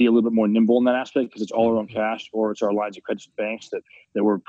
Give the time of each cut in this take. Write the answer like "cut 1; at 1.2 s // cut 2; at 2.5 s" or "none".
none